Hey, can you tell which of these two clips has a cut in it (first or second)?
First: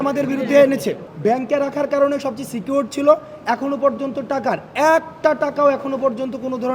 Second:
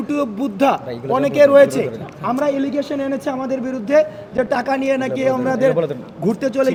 first